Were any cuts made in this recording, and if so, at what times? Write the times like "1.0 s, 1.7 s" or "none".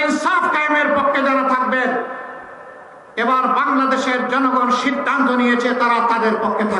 none